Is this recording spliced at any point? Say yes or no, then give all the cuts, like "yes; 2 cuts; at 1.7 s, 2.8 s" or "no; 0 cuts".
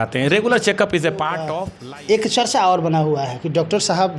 yes; 1 cut; at 1.6 s